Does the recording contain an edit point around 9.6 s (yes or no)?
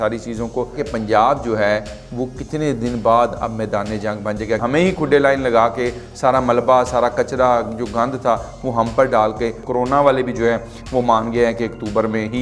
yes